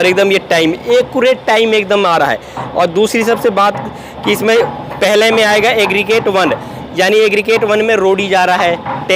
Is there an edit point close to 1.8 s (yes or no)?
no